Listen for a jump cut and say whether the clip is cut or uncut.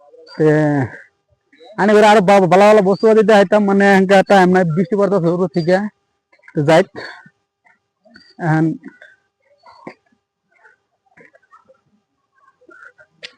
uncut